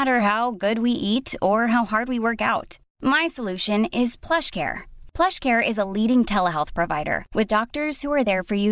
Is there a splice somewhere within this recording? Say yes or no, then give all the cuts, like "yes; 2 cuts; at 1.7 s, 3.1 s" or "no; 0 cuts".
no; 0 cuts